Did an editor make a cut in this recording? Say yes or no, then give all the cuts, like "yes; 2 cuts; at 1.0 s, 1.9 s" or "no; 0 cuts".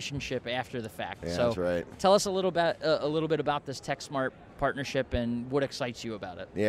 no; 0 cuts